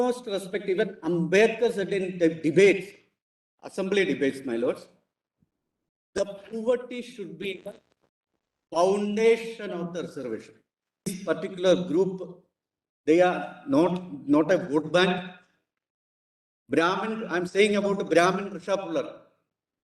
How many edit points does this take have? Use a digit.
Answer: 1